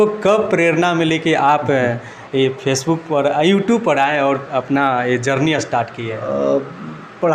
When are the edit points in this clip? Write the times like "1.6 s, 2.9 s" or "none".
none